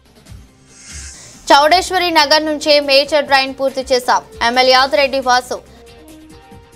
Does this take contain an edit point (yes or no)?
yes